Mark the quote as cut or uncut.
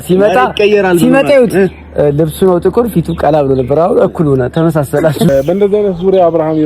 cut